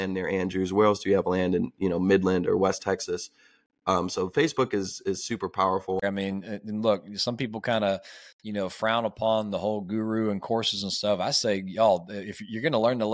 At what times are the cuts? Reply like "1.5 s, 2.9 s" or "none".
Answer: 6.0 s